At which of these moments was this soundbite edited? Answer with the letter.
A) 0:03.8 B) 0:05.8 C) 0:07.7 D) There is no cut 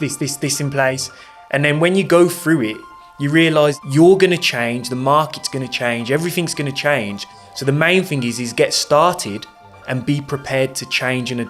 A